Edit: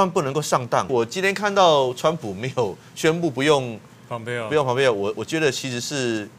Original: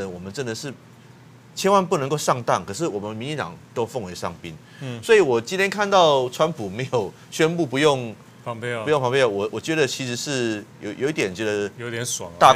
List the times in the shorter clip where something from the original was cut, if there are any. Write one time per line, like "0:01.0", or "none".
0:00.9